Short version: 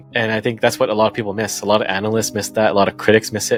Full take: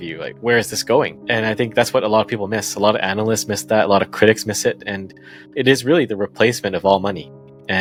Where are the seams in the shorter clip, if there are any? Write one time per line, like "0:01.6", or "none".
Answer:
none